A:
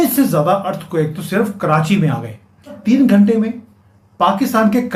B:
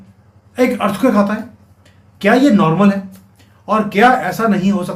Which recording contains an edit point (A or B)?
A